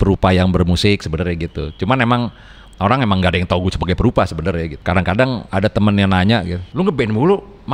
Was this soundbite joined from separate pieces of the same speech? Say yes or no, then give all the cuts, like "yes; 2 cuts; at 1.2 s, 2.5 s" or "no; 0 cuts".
yes; 3 cuts; at 4.7 s, 5.4 s, 6.6 s